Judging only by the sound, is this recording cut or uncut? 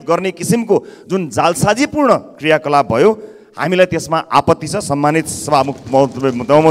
uncut